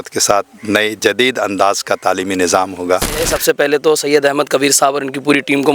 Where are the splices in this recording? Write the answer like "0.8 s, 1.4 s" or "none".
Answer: 3.3 s